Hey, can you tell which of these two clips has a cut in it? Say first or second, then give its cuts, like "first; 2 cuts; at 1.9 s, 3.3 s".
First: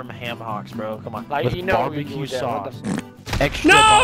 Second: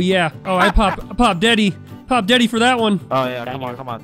first; 1 cut; at 1.2 s